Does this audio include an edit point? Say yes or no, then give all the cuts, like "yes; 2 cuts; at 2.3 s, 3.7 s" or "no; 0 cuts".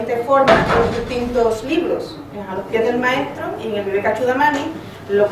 yes; 1 cut; at 4.0 s